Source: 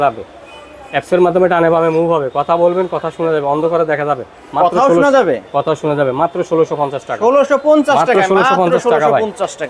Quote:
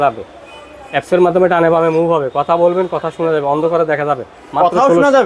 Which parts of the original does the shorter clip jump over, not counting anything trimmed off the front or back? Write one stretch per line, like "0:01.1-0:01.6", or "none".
none